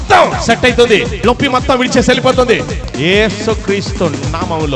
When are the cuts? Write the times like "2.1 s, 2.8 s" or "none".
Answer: 1.1 s, 2.7 s